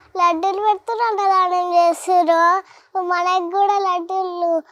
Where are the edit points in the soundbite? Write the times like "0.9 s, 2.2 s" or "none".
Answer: none